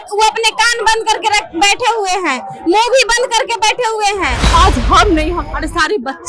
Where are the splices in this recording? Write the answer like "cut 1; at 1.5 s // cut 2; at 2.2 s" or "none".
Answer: cut 1; at 4.4 s